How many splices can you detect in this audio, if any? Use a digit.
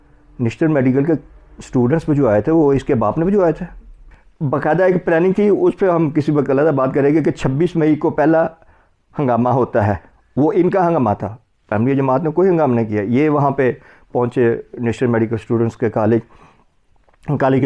0